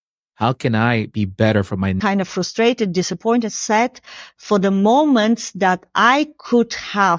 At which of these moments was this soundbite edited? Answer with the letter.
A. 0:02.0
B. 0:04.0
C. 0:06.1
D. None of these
A